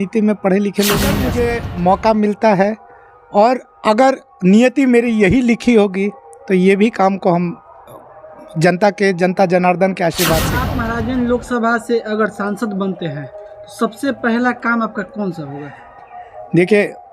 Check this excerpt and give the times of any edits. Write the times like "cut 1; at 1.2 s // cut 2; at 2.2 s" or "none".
cut 1; at 1.2 s // cut 2; at 10.7 s